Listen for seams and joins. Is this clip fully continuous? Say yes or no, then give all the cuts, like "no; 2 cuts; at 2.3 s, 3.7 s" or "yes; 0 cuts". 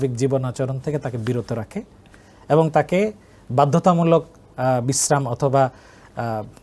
yes; 0 cuts